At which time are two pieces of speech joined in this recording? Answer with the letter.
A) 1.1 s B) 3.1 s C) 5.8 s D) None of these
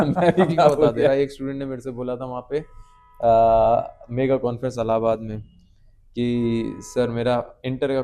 A